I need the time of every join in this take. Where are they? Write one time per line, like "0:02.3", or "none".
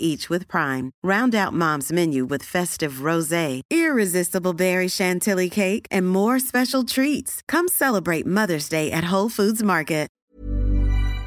0:10.2